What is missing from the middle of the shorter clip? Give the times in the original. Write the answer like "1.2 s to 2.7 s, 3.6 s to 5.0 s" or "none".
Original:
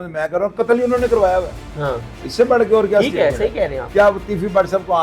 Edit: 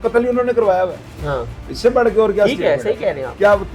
none